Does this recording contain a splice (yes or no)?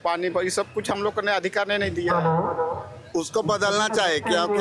yes